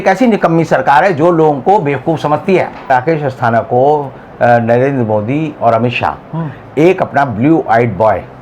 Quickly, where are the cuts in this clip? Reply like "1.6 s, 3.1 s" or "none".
2.9 s